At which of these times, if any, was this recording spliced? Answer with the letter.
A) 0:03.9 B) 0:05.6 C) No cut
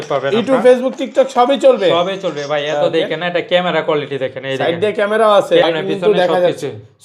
B